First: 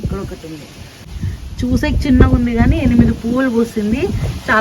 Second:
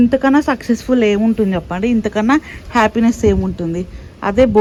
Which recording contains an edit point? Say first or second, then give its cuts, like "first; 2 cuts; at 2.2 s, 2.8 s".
first; 1 cut; at 1.1 s